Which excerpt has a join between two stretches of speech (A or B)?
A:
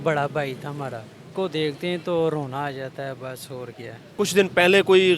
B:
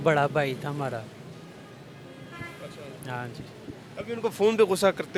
A